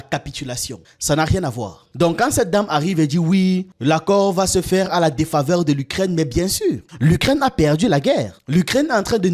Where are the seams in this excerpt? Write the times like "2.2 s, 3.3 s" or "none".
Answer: 1.8 s